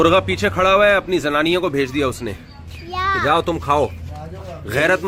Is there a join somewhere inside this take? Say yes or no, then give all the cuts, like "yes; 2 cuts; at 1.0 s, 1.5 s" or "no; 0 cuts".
no; 0 cuts